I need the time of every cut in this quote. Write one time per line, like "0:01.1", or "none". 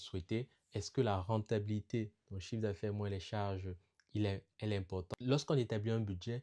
0:05.1